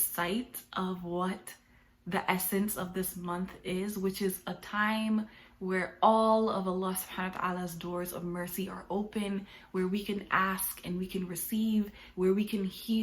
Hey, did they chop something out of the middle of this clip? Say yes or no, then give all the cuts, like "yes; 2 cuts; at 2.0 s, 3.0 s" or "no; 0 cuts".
no; 0 cuts